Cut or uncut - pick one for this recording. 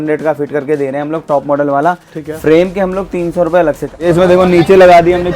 cut